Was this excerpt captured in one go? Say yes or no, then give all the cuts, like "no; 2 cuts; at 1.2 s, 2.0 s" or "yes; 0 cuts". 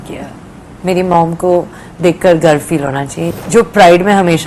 no; 1 cut; at 3.3 s